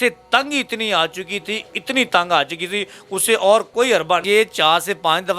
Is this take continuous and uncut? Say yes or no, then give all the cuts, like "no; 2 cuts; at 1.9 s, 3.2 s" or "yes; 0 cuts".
no; 1 cut; at 4.2 s